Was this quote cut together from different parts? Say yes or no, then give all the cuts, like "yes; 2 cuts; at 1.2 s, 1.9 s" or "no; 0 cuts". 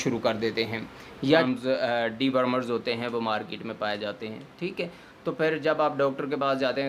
yes; 1 cut; at 1.4 s